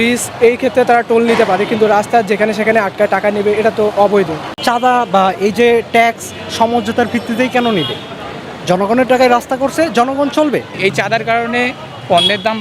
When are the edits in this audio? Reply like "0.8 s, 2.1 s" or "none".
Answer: 4.5 s, 10.7 s